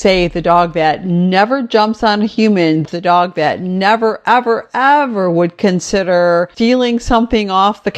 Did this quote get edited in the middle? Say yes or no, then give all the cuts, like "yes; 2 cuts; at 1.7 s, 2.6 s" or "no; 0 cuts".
yes; 2 cuts; at 2.8 s, 6.5 s